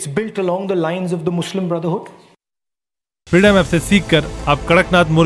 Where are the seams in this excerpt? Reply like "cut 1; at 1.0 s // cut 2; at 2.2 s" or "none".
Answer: cut 1; at 3.0 s